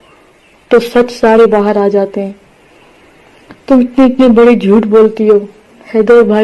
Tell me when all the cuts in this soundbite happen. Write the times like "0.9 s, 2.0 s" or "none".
none